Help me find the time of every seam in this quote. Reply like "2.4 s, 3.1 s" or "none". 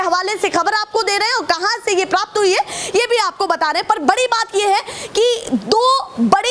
none

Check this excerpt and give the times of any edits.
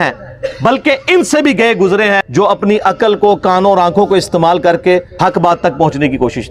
2.2 s, 5.1 s

